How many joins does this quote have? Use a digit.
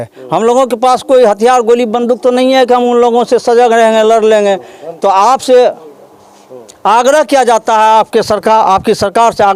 0